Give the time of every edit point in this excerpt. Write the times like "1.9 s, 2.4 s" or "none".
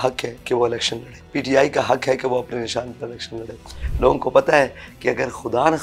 1.2 s, 3.8 s

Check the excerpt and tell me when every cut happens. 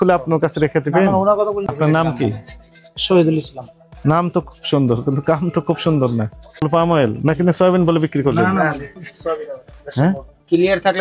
1.7 s, 6.7 s

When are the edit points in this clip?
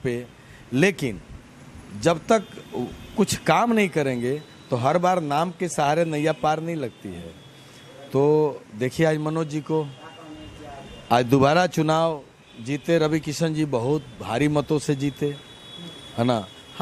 none

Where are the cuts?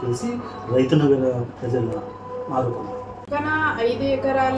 3.2 s

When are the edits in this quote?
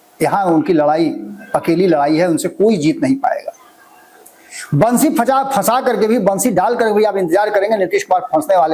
none

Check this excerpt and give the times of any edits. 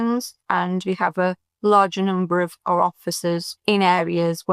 3.5 s

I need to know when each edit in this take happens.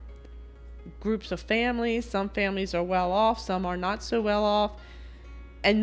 none

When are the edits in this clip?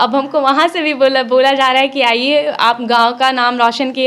none

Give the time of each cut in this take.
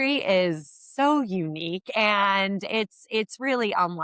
none

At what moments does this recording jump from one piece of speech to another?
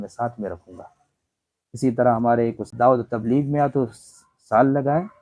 2.6 s

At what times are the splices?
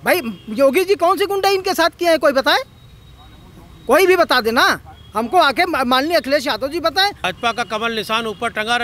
7.3 s

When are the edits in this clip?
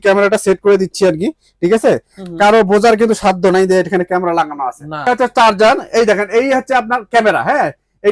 5.1 s

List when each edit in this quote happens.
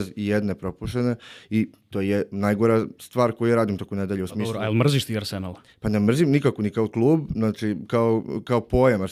none

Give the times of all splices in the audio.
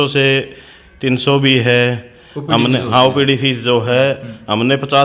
none

